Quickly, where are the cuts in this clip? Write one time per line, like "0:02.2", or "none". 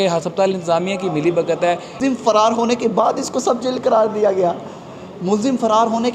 0:02.0